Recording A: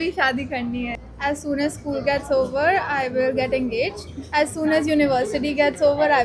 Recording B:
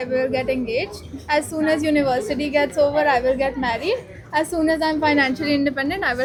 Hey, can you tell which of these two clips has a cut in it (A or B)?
A